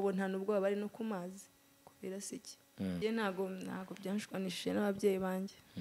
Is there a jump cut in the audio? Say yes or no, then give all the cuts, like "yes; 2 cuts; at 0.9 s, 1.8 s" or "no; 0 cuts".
yes; 1 cut; at 3.0 s